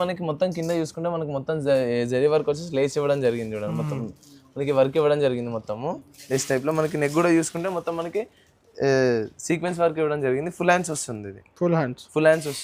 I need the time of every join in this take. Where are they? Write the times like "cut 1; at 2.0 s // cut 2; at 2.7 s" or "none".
none